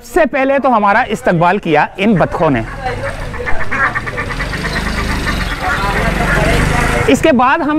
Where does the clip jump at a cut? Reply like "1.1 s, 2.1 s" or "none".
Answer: none